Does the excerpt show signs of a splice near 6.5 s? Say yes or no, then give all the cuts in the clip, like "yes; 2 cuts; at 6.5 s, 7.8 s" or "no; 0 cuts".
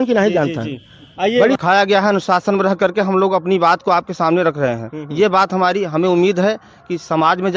no; 1 cut; at 1.6 s